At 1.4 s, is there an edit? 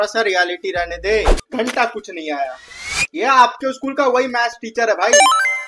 yes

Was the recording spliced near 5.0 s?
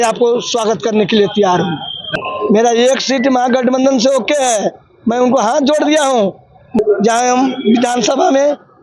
no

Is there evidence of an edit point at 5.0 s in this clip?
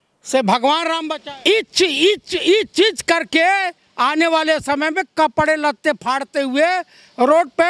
no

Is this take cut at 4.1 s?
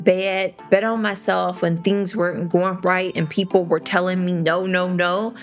no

